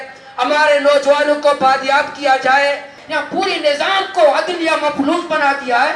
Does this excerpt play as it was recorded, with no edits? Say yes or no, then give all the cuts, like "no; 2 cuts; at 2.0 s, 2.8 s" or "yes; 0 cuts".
no; 1 cut; at 3.0 s